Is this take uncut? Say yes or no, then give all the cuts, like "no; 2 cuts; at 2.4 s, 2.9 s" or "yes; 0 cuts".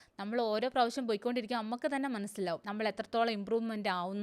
no; 1 cut; at 2.7 s